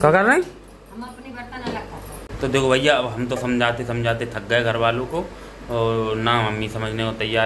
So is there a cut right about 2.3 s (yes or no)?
yes